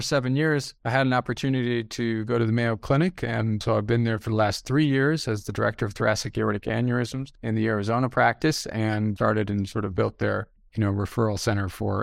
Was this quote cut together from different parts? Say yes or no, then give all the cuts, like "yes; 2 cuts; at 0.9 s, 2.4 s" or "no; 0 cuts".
no; 0 cuts